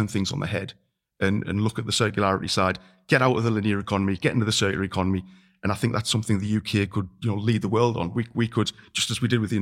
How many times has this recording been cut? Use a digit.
0